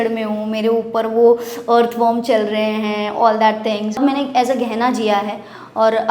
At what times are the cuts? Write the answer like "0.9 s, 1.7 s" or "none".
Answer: 4.0 s